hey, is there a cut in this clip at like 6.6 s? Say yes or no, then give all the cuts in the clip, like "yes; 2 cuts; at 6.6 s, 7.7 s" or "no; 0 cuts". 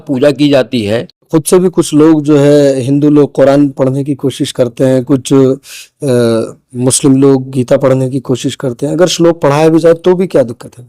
no; 1 cut; at 1.1 s